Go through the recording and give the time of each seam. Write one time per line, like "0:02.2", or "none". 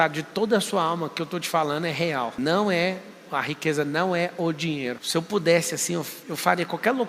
0:02.3
0:05.0